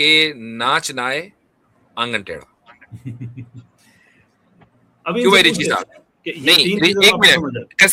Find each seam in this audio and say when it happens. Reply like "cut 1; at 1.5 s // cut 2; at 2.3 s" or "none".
none